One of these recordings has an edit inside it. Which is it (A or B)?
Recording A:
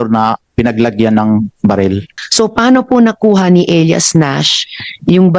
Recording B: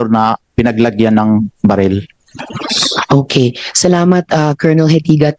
A